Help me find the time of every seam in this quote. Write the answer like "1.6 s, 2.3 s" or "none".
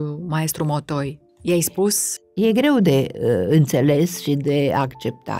1.3 s, 2.1 s